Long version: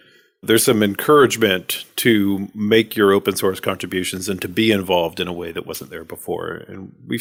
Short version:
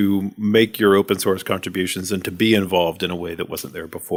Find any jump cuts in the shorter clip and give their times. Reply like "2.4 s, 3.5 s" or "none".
none